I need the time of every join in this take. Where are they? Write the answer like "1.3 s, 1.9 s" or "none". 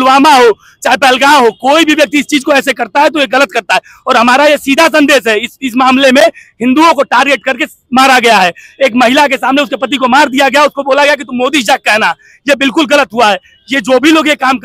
none